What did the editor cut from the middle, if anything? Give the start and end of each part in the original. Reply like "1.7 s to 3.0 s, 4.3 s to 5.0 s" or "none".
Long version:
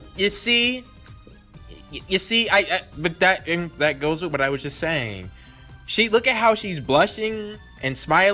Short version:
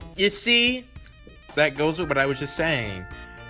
1.5 s to 3.7 s

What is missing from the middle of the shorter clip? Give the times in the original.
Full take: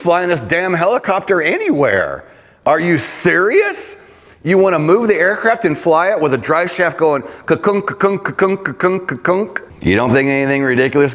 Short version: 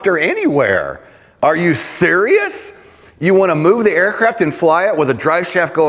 none

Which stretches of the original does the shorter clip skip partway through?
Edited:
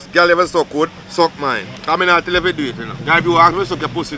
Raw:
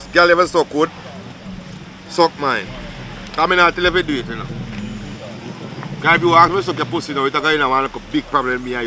1.0 s to 2.0 s, 2.7 s to 3.2 s, 4.4 s to 5.9 s

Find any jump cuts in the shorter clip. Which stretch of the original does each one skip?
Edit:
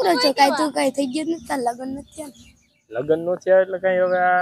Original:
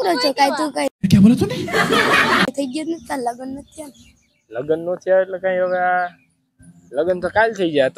0.9 s to 2.5 s

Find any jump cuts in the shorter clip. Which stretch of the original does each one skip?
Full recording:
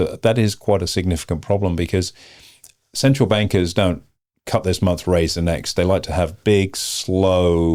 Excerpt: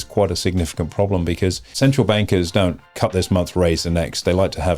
2.2 s to 2.9 s, 4.1 s to 4.4 s

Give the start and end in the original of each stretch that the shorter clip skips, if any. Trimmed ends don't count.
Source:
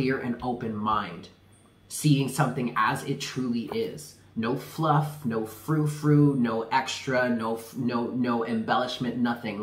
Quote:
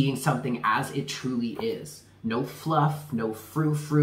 none

